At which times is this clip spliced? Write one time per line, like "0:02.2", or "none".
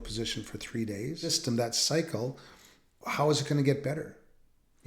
0:01.4